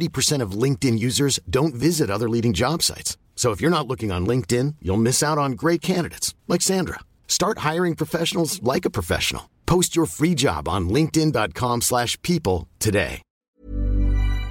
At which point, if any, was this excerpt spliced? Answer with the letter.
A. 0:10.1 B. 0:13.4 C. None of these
B